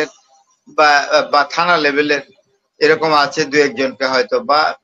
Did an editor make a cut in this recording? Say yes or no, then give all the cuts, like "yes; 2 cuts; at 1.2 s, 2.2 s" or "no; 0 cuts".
no; 0 cuts